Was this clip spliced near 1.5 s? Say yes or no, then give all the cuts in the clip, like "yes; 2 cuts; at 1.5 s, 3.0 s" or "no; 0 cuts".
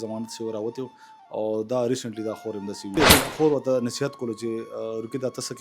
no; 1 cut; at 3.0 s